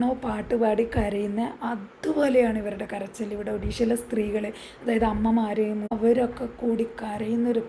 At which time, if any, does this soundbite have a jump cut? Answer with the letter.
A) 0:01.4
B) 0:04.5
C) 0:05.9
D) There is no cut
C